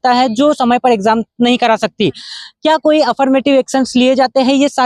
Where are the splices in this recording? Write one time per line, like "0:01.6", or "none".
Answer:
none